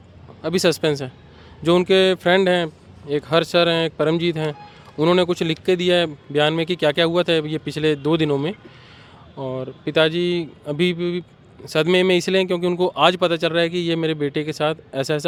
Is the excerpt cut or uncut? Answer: uncut